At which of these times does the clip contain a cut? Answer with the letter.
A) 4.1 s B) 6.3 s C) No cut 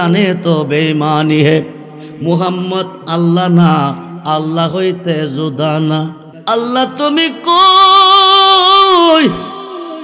B